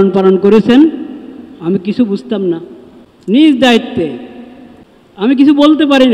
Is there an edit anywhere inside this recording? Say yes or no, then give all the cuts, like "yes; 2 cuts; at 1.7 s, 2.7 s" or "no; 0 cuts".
yes; 2 cuts; at 3.3 s, 5.4 s